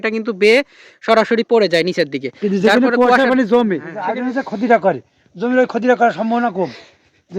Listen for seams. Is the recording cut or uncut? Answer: cut